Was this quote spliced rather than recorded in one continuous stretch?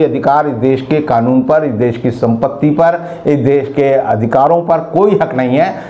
no; 0 cuts

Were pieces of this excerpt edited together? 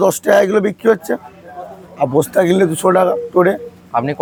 no; 0 cuts

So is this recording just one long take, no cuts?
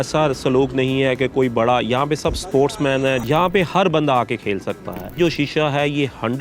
no; 2 cuts; at 3.2 s, 5.2 s

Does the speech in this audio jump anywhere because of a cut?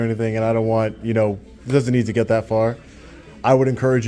no; 0 cuts

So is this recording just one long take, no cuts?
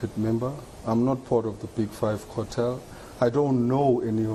yes; 0 cuts

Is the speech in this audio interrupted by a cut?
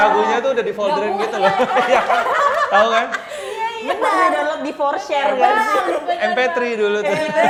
no; 0 cuts

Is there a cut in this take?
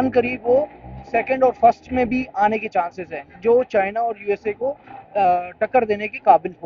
no; 0 cuts

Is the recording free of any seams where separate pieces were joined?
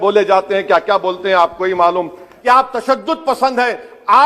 no; 1 cut; at 2.3 s

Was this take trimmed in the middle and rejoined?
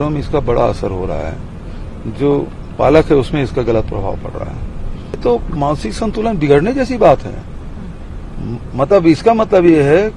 yes; 1 cut; at 5.2 s

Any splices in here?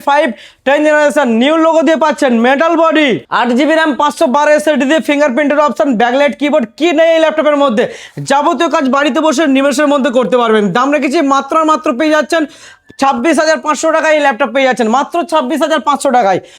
no; 0 cuts

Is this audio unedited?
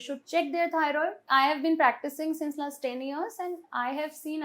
no; 1 cut; at 1.3 s

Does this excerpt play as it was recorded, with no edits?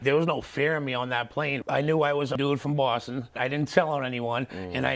no; 1 cut; at 1.6 s

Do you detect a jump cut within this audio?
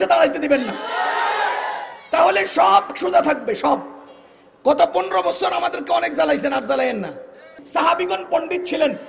yes; 1 cut; at 7.6 s

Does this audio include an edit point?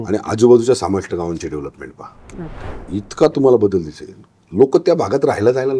yes; 1 cut; at 2.7 s

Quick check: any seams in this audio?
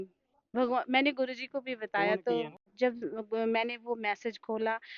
yes; 1 cut; at 2.6 s

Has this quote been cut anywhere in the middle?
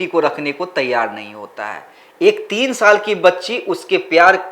no; 0 cuts

